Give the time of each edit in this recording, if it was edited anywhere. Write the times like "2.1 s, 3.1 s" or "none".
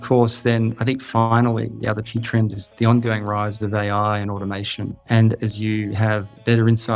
none